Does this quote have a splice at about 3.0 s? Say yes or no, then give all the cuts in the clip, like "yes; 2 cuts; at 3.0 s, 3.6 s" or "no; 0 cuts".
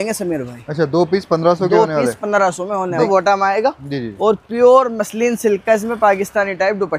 yes; 1 cut; at 3.0 s